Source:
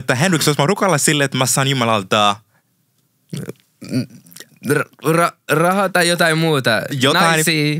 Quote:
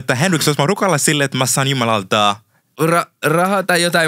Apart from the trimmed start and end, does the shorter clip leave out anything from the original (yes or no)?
yes